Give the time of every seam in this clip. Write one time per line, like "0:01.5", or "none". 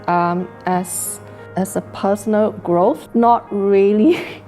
0:03.0